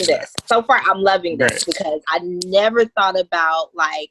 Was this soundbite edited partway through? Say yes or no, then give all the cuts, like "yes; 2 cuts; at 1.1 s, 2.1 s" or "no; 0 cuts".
yes; 1 cut; at 2.0 s